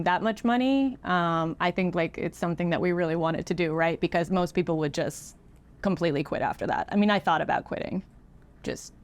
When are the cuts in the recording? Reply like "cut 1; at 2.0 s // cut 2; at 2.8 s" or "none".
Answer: none